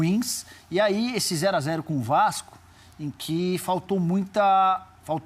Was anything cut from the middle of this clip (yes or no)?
yes